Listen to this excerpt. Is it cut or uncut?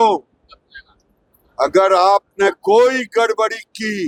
uncut